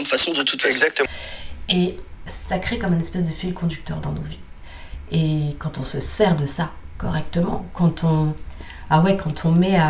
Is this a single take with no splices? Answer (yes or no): no